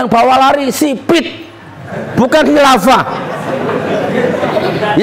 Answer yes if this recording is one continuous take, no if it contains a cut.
yes